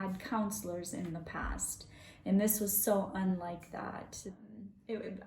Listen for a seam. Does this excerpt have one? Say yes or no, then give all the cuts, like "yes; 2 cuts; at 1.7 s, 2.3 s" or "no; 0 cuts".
yes; 1 cut; at 4.4 s